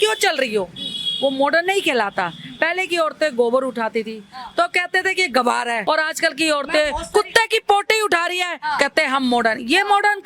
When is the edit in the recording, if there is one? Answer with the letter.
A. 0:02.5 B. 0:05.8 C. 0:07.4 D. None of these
B